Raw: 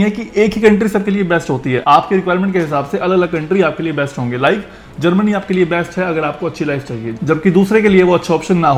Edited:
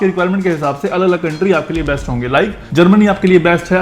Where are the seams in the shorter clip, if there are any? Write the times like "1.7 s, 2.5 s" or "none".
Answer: 2.6 s